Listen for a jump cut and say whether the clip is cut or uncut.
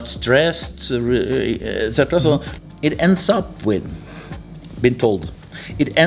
cut